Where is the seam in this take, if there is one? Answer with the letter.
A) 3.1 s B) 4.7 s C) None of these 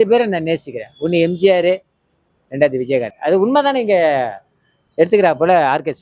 A